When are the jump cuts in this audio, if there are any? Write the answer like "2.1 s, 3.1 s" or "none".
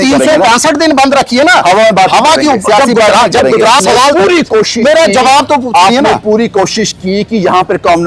3.8 s